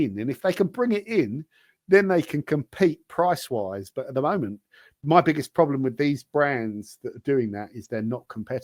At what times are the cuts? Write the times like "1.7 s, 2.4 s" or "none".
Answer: none